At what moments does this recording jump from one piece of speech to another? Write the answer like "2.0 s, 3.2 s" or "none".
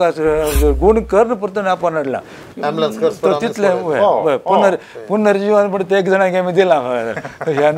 none